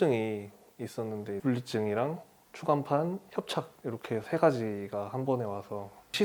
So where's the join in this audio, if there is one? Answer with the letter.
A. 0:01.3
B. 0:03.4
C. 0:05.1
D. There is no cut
A